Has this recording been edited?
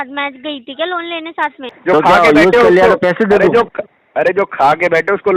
yes; 1 cut; at 1.7 s

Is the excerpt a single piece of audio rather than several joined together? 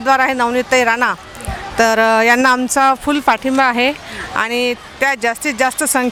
yes; 0 cuts

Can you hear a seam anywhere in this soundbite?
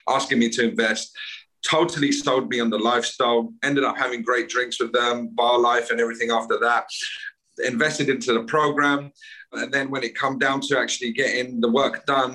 yes; 1 cut; at 9.5 s

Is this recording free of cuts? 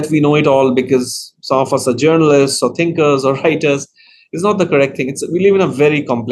yes; 0 cuts

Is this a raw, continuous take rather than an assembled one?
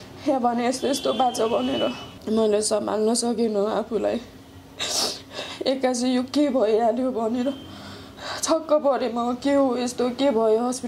no; 1 cut; at 2.1 s

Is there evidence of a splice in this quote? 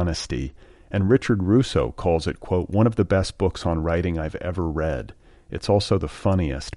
no; 0 cuts

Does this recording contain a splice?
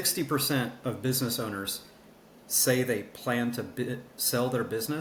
no; 0 cuts

